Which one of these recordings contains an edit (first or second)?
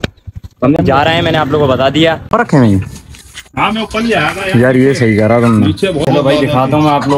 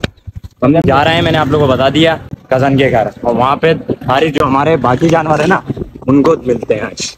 first